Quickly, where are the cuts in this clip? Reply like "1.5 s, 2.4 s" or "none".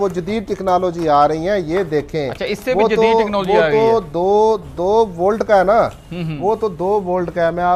none